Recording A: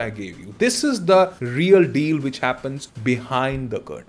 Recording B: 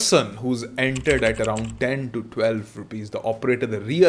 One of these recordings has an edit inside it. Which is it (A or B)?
A